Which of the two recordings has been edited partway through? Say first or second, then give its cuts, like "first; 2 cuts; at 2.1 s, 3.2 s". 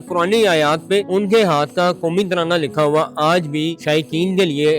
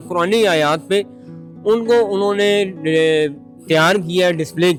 first; 2 cuts; at 1.1 s, 3.8 s